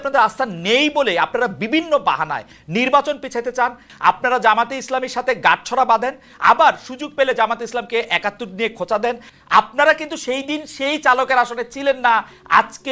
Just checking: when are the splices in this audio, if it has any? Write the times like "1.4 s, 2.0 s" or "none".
3.9 s, 9.3 s

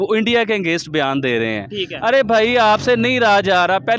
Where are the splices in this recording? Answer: none

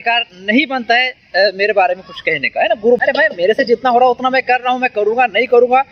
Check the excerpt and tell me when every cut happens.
3.0 s

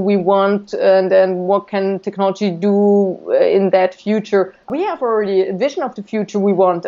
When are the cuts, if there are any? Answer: 4.7 s

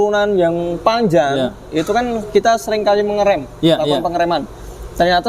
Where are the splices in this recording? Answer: none

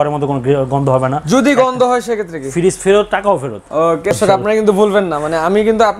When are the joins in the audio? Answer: 4.1 s

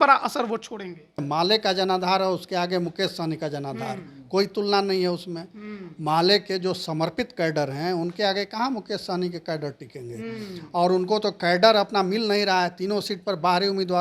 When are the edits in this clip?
1.2 s

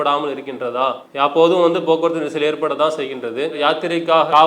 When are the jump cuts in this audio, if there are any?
1.0 s, 3.6 s

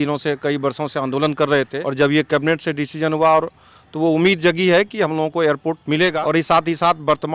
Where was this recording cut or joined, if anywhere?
1.8 s, 6.1 s

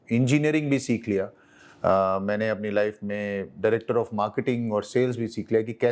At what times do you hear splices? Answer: none

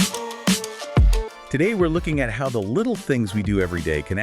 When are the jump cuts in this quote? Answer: 1.1 s

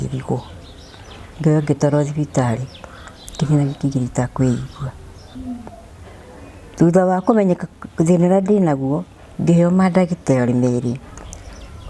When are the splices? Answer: 5.3 s

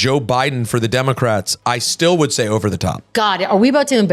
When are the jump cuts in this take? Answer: 3.1 s

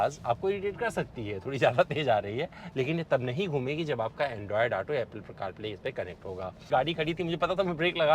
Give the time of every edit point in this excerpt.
2.6 s, 6.7 s

